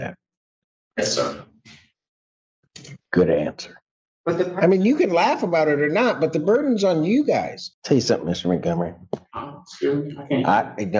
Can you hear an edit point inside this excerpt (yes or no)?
yes